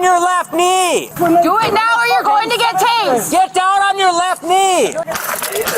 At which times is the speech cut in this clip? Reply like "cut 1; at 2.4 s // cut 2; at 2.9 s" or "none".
cut 1; at 1.1 s // cut 2; at 3.3 s

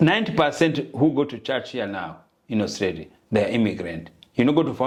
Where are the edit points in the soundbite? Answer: none

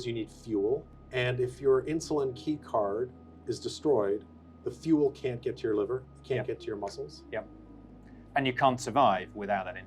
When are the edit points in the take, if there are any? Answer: cut 1; at 1.0 s

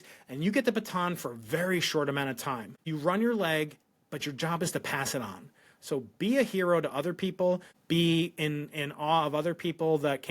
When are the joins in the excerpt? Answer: cut 1; at 2.8 s // cut 2; at 7.7 s

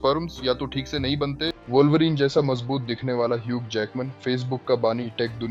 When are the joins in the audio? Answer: cut 1; at 1.5 s

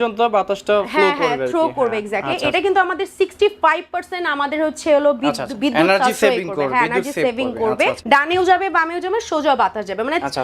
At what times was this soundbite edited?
cut 1; at 2.5 s // cut 2; at 8.0 s

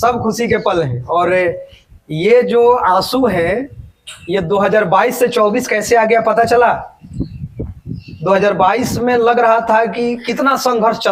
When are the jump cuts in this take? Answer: none

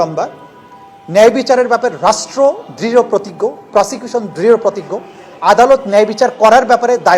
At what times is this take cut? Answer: none

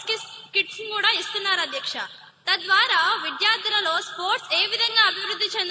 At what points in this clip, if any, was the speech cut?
none

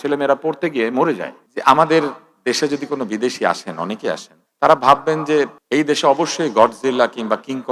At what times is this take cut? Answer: cut 1; at 1.5 s

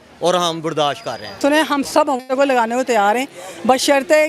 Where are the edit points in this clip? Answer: cut 1; at 1.4 s

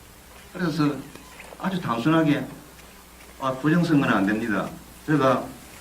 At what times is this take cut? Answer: cut 1; at 0.9 s

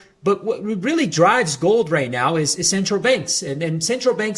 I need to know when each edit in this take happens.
none

